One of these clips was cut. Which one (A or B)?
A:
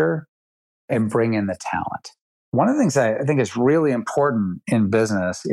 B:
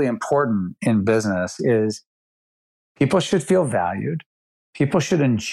A